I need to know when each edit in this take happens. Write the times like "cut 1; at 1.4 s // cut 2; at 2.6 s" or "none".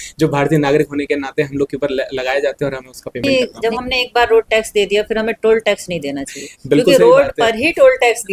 cut 1; at 3.2 s